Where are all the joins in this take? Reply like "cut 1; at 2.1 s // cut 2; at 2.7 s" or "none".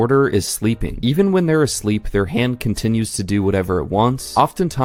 none

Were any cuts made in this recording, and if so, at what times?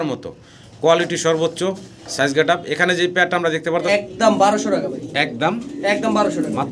cut 1; at 3.9 s

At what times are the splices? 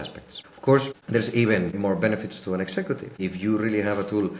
cut 1; at 1.0 s // cut 2; at 3.1 s

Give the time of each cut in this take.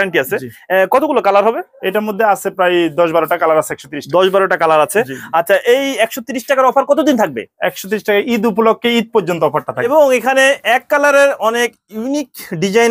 cut 1; at 9.7 s

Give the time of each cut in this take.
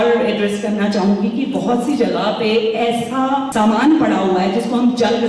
cut 1; at 3.5 s

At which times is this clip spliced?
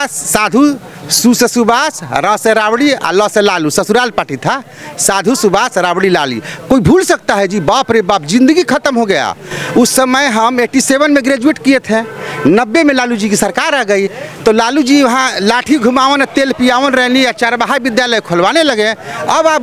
none

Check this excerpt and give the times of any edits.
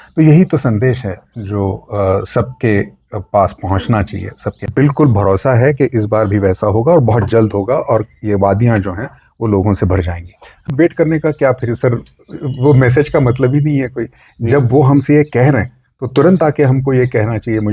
cut 1; at 4.7 s // cut 2; at 10.7 s

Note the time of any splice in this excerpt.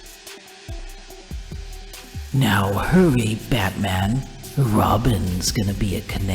cut 1; at 2.2 s

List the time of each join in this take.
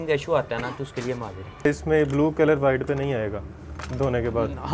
cut 1; at 1.7 s

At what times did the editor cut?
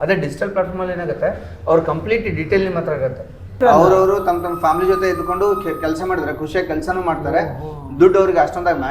cut 1; at 3.6 s

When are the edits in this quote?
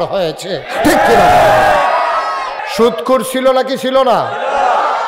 cut 1; at 2.6 s

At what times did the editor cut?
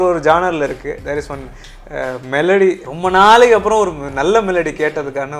cut 1; at 1.0 s // cut 2; at 2.8 s

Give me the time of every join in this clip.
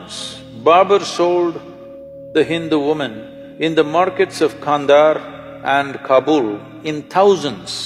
none

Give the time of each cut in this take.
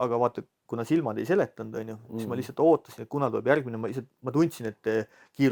none

